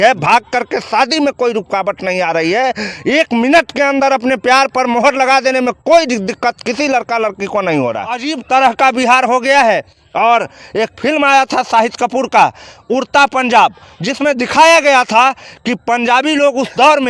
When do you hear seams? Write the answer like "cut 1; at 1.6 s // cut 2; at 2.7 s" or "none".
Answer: cut 1; at 8.3 s